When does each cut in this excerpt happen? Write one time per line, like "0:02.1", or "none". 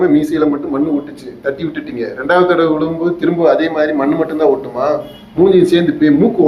none